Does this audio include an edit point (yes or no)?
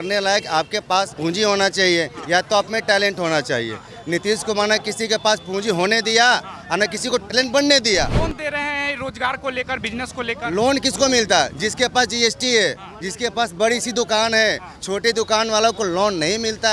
yes